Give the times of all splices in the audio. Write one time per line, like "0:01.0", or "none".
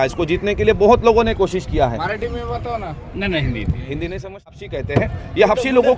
0:04.7